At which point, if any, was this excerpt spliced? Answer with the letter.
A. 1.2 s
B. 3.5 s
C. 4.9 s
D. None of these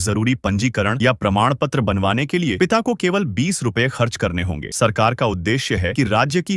D